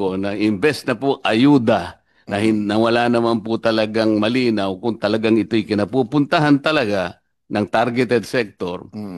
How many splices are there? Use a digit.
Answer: 0